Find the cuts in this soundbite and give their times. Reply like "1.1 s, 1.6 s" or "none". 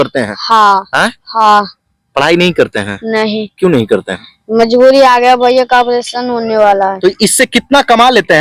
7.0 s